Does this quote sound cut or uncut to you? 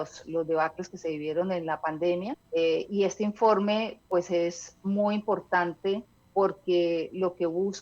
cut